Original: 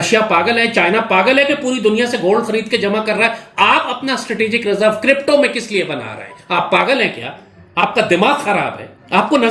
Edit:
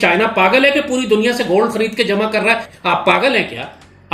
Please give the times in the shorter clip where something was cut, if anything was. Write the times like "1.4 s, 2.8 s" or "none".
2.7 s